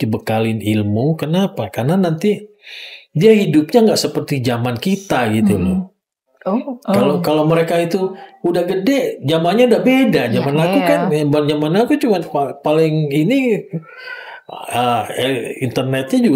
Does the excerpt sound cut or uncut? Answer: uncut